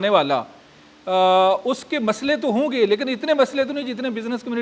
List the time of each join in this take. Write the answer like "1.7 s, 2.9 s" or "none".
none